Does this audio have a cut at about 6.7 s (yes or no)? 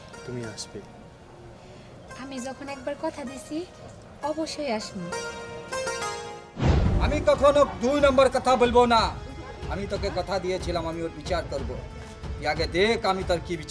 yes